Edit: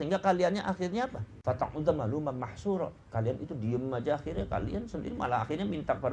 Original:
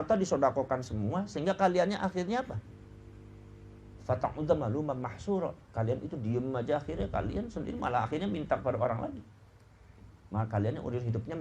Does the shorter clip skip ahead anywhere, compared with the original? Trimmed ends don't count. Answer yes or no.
yes